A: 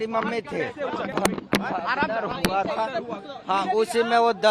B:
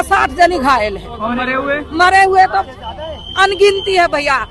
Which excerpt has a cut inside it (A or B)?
A